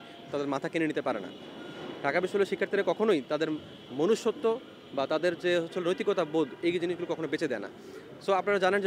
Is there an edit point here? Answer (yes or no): no